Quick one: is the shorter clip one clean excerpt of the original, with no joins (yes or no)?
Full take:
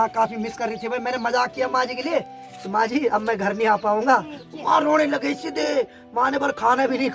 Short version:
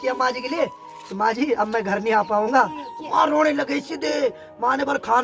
yes